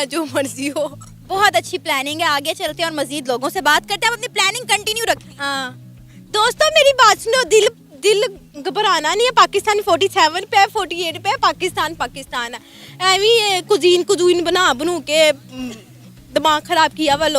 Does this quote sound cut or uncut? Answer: uncut